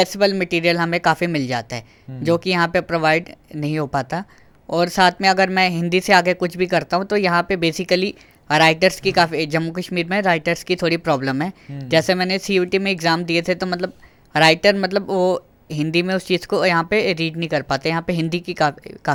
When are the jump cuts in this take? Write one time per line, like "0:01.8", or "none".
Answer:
none